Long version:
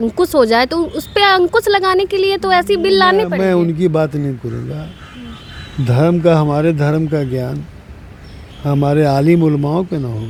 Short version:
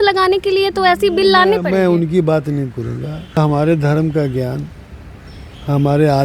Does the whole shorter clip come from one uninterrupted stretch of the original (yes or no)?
no